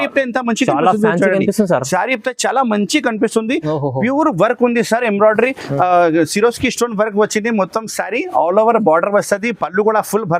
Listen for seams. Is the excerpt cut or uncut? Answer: uncut